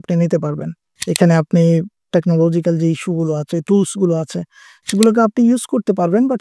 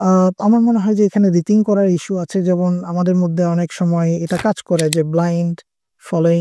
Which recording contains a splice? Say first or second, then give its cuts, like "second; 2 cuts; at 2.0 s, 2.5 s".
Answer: first; 1 cut; at 1.0 s